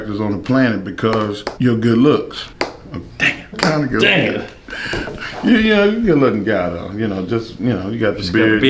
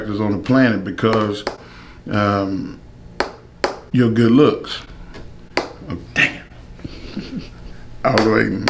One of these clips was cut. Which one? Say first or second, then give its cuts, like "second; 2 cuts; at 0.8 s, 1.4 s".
first; 3 cuts; at 1.5 s, 2.4 s, 3.6 s